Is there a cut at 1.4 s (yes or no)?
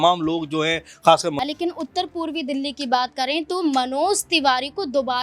yes